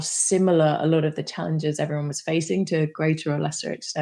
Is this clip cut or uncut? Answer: uncut